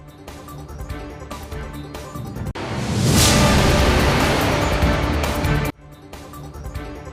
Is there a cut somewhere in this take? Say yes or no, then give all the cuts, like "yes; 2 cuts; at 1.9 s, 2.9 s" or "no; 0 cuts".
yes; 1 cut; at 1.6 s